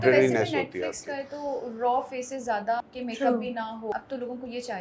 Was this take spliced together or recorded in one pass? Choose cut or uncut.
cut